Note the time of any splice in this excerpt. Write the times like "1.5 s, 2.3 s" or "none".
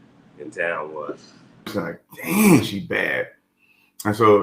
1.7 s